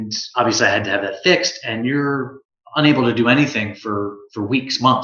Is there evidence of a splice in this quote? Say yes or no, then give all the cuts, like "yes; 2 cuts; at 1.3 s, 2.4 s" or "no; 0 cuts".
no; 0 cuts